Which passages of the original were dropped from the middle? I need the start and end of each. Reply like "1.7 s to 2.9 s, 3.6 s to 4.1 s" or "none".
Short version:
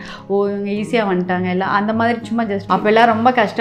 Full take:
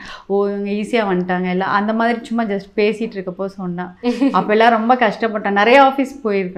2.7 s to 4.3 s